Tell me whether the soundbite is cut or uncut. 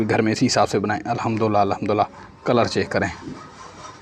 uncut